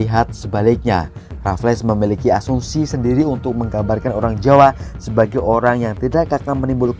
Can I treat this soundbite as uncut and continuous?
yes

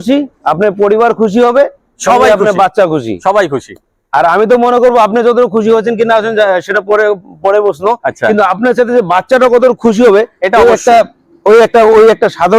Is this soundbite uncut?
yes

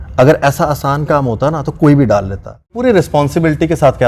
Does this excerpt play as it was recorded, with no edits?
no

